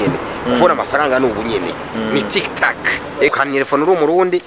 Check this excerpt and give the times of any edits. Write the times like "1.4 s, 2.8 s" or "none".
3.3 s